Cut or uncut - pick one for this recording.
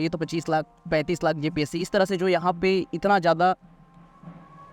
uncut